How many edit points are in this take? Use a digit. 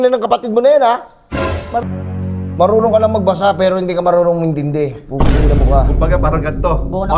1